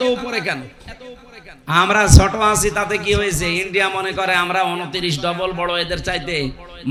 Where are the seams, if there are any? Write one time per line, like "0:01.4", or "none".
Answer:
none